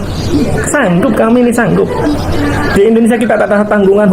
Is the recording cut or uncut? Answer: cut